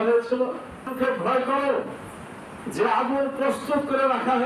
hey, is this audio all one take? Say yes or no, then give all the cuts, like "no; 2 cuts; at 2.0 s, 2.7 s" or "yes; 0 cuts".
no; 1 cut; at 0.9 s